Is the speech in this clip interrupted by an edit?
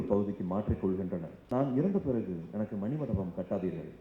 yes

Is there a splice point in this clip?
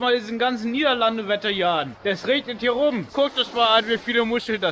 yes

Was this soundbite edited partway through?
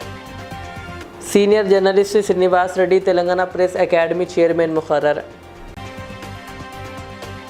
no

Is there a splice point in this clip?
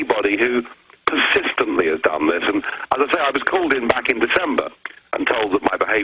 yes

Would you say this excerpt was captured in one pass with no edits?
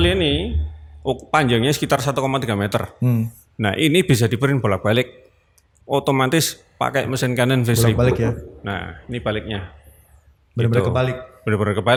yes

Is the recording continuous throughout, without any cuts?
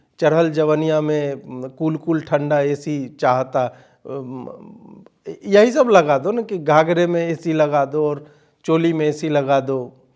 yes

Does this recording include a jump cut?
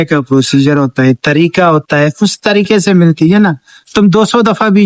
no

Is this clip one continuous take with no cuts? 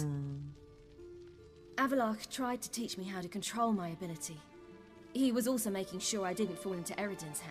yes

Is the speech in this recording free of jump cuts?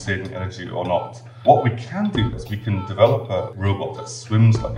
no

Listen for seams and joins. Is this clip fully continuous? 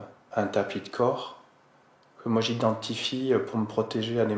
yes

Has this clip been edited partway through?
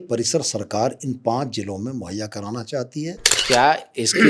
yes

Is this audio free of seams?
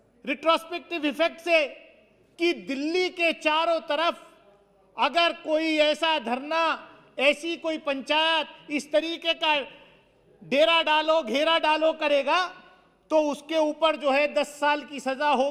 yes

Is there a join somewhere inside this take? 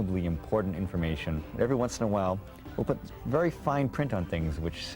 yes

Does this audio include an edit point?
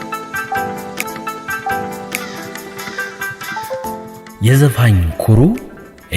yes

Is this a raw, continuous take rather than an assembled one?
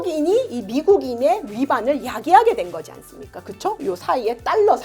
yes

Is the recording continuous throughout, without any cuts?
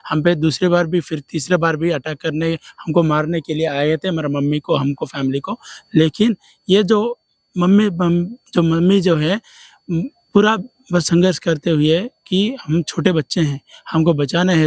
yes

